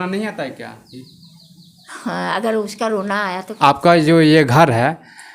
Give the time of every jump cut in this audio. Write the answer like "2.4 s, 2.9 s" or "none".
3.6 s